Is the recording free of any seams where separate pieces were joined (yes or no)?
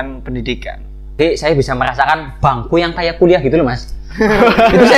no